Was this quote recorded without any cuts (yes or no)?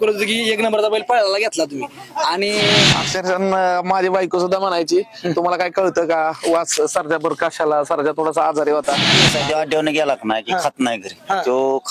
no